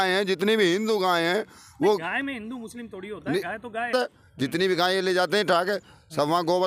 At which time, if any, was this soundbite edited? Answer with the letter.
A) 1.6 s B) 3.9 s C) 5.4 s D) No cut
B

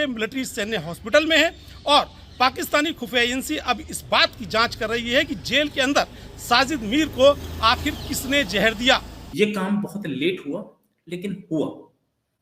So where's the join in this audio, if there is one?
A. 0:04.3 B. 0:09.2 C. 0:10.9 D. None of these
B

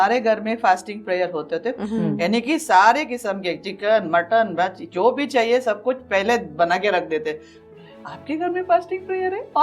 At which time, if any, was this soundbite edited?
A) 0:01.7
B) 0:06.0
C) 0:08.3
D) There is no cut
A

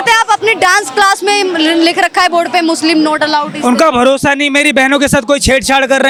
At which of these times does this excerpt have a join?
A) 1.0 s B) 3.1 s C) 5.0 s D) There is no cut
D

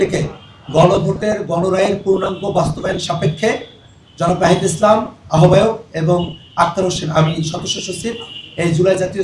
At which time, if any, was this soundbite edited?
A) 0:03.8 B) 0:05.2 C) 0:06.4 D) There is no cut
D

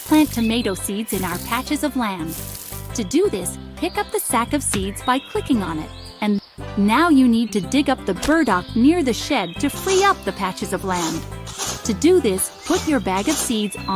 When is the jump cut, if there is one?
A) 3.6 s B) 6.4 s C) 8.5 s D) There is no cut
B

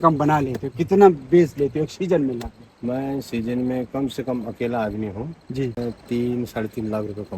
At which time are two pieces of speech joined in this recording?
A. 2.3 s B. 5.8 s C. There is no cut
B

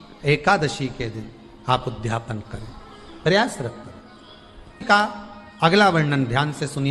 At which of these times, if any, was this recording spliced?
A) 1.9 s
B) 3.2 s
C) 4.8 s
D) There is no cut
C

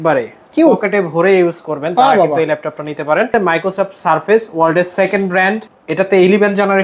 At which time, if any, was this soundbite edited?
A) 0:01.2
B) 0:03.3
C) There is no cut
B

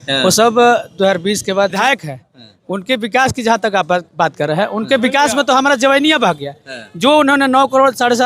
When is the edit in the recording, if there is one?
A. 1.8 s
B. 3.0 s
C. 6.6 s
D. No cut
A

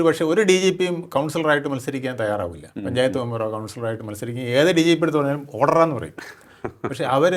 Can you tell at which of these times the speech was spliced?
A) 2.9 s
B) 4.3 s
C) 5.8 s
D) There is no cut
D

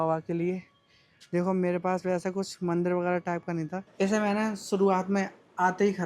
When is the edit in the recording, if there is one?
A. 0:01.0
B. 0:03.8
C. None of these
B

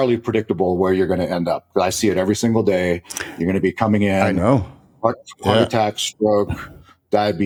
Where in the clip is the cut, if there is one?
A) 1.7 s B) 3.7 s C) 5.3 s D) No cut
D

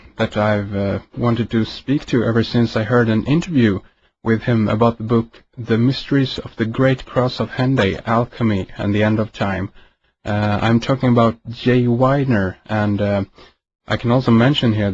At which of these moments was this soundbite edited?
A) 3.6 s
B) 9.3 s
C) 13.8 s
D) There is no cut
C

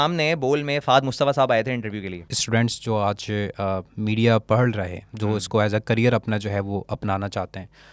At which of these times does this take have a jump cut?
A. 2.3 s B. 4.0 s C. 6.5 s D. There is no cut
A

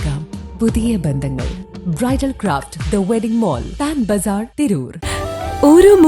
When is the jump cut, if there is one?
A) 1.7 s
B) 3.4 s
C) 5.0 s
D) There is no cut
C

